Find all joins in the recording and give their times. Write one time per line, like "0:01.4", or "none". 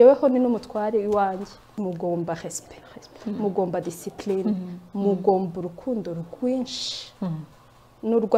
0:01.7